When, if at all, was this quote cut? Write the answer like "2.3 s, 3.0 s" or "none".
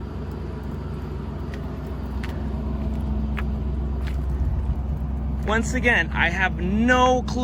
none